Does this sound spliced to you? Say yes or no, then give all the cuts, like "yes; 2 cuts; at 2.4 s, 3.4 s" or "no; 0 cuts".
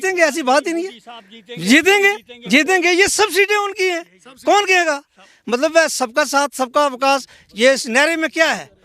no; 0 cuts